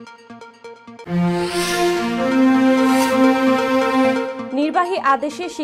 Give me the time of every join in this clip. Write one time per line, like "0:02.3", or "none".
0:01.0
0:04.4